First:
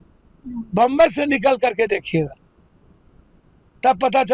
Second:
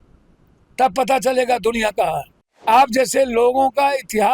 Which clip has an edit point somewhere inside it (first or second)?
second